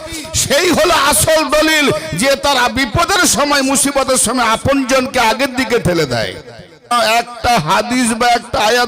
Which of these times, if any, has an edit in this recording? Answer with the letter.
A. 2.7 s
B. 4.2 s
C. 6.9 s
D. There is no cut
C